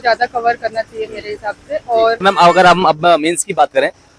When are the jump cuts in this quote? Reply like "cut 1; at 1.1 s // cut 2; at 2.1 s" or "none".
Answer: cut 1; at 2.2 s